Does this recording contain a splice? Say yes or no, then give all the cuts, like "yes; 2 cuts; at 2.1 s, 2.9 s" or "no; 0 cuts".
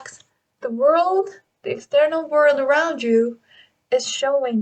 no; 0 cuts